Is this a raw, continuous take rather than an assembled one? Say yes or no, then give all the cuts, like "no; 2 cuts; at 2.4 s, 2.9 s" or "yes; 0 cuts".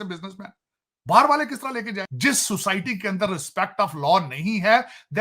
no; 1 cut; at 2.0 s